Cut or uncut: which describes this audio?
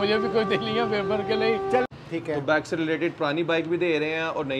cut